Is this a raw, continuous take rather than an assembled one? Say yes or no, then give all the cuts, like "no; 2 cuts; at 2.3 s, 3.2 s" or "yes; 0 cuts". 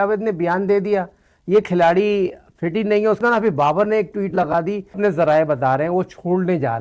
no; 2 cuts; at 3.2 s, 5.0 s